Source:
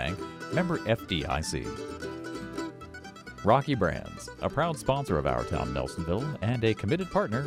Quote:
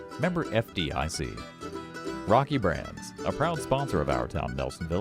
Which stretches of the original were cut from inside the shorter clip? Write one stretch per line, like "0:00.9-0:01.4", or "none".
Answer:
0:01.9-0:02.7